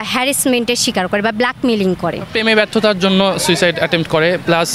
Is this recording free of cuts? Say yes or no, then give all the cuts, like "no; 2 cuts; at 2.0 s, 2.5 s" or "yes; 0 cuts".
no; 1 cut; at 2.3 s